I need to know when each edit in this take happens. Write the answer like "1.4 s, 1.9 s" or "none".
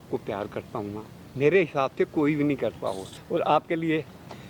3.1 s